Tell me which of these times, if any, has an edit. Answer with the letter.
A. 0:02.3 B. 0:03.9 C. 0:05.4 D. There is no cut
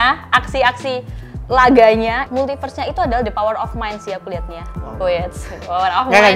A